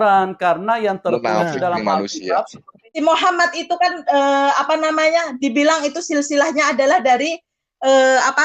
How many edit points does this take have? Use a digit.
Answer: 1